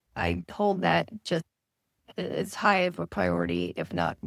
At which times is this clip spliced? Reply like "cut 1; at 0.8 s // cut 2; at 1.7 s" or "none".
cut 1; at 2.1 s